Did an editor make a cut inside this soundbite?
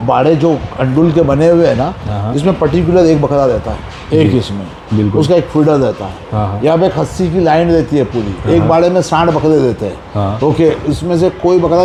no; 0 cuts

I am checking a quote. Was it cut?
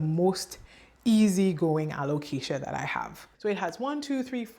yes; 1 cut; at 3.2 s

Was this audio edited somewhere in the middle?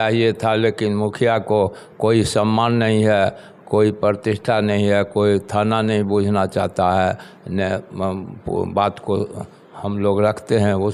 no; 0 cuts

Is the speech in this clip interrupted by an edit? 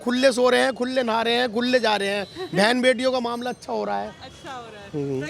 no; 0 cuts

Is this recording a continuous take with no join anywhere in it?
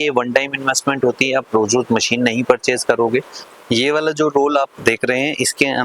no; 1 cut; at 3.4 s

